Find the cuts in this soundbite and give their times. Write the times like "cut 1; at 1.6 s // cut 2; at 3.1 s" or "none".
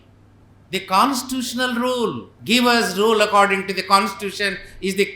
cut 1; at 2.3 s